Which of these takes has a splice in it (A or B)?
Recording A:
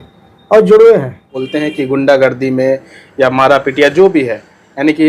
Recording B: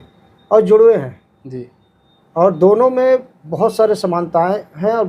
A